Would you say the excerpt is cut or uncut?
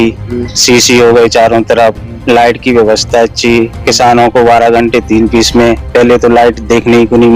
uncut